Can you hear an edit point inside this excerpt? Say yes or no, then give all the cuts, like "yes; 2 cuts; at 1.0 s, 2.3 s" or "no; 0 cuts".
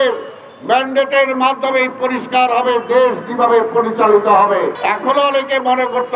yes; 1 cut; at 4.8 s